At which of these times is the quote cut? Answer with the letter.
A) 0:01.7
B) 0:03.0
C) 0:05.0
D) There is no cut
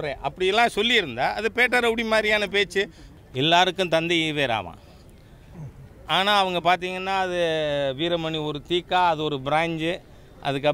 B